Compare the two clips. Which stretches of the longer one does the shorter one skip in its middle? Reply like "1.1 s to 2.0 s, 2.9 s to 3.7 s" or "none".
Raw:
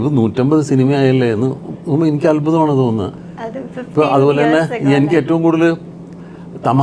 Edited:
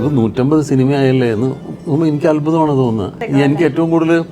3.2 s to 4.7 s

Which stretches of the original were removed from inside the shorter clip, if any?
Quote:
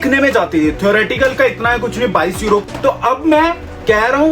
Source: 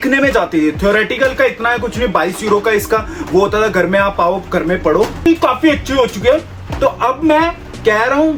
2.6 s to 6.6 s

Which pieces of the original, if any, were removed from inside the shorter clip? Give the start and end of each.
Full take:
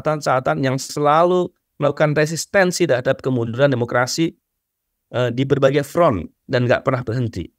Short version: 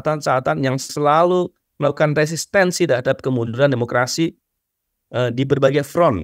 none

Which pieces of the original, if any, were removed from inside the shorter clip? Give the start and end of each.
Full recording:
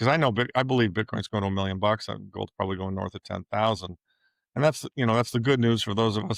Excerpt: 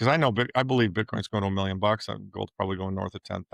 none

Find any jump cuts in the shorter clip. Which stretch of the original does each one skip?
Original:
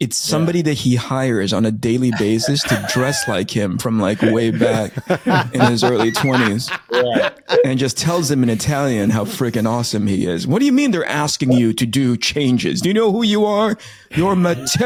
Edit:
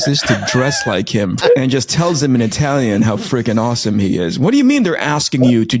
3.8 s to 7.4 s

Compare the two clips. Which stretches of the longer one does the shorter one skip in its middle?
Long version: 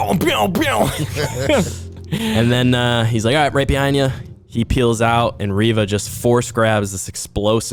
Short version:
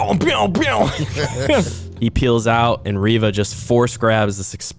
1.8 s to 4.4 s

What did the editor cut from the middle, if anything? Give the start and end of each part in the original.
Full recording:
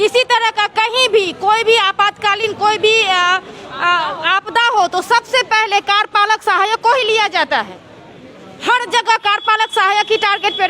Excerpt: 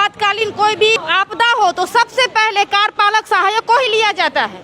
3.0 s to 4.1 s

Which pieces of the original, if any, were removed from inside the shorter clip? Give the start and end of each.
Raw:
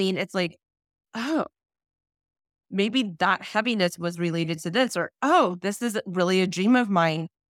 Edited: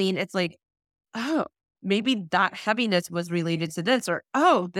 1.7 s to 2.5 s

